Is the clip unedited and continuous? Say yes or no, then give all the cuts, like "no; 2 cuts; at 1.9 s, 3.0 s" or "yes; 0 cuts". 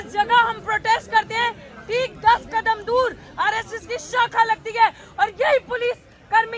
yes; 0 cuts